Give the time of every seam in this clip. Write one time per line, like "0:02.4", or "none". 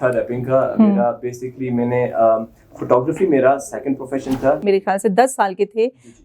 0:04.6